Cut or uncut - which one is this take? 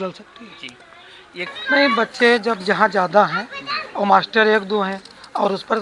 cut